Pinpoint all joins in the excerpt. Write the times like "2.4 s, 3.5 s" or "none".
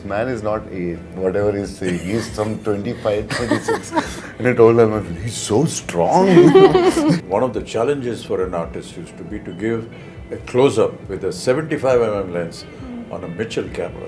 7.2 s